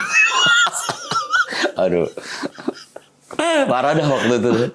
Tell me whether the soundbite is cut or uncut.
uncut